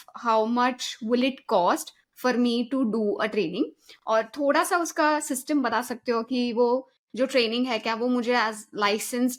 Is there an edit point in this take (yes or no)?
no